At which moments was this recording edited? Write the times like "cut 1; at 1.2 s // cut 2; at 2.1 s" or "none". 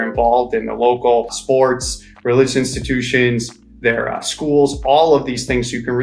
cut 1; at 1.4 s